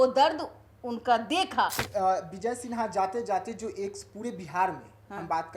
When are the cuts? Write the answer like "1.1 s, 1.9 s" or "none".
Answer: 1.8 s

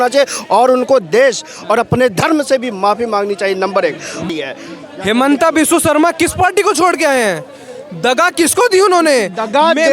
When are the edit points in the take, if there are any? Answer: 4.3 s

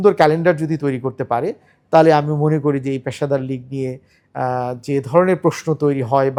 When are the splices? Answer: none

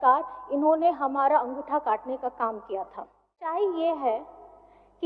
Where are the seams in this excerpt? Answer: 3.4 s

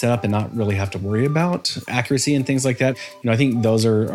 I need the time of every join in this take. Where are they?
1.8 s, 2.9 s

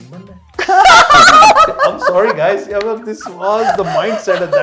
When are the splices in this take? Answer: none

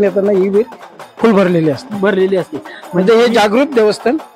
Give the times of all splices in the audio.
none

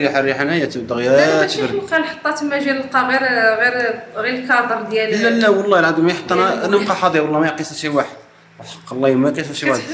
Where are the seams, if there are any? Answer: none

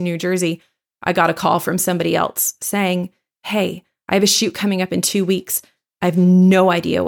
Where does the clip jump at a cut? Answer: none

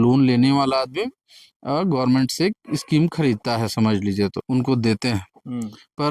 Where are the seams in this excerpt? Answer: 4.4 s

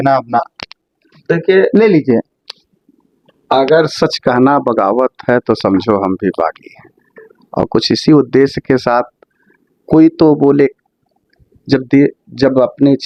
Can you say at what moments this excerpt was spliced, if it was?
none

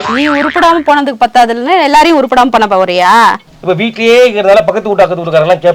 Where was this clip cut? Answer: 3.5 s

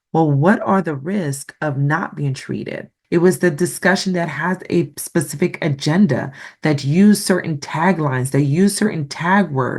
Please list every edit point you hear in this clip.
2.9 s

